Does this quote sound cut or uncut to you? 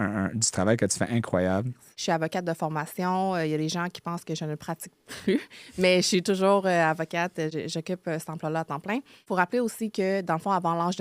cut